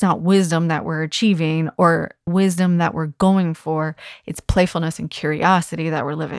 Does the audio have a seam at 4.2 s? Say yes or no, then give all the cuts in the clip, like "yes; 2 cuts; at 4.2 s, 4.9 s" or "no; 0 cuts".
no; 1 cut; at 2.3 s